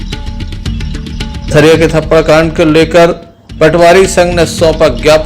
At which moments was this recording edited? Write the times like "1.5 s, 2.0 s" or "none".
1.3 s

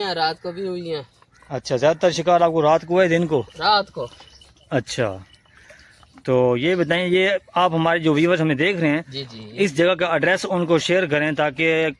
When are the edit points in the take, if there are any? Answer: none

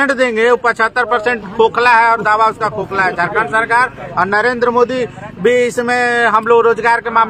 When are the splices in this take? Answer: none

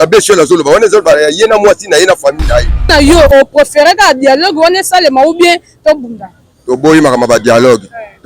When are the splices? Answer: 2.9 s

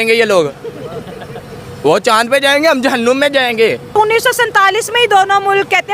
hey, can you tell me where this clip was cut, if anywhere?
3.9 s

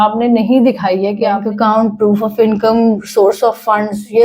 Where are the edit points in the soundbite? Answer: 1.4 s

